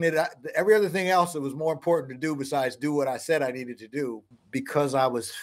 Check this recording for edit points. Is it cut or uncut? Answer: cut